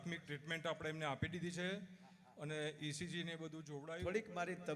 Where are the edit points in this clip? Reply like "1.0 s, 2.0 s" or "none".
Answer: 3.7 s